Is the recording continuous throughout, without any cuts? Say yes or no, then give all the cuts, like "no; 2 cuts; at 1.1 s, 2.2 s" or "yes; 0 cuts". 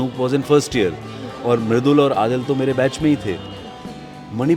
yes; 0 cuts